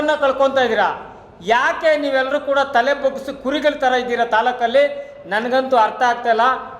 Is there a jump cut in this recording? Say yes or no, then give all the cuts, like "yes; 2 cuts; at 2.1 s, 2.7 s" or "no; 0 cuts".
no; 0 cuts